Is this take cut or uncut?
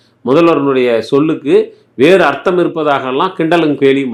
uncut